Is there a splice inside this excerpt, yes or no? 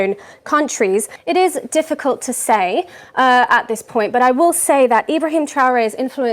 yes